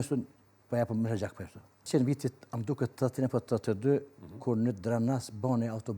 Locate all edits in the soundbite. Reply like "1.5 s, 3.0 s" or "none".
1.9 s